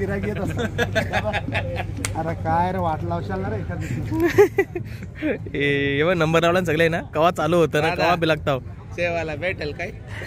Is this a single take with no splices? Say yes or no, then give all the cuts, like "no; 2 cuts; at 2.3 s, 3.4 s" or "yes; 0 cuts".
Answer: yes; 0 cuts